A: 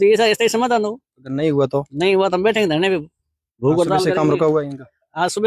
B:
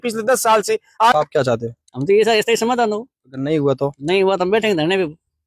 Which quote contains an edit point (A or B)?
B